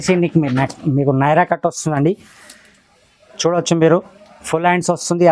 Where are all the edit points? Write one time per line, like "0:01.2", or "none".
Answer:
none